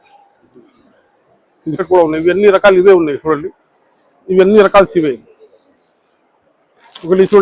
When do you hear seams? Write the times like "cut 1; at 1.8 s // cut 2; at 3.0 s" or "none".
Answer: cut 1; at 1.8 s